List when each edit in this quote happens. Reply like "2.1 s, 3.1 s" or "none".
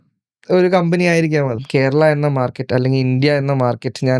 1.6 s